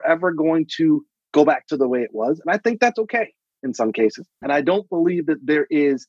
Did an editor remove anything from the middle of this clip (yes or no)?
yes